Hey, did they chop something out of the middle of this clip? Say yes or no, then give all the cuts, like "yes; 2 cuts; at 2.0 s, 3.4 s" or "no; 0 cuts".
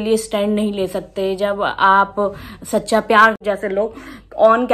yes; 1 cut; at 3.4 s